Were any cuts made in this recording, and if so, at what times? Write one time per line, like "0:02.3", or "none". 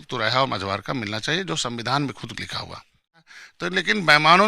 0:03.3